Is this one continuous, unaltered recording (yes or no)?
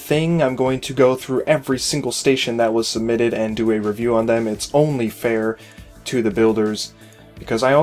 no